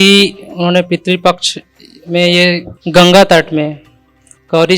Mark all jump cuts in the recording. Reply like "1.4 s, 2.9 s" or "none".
2.7 s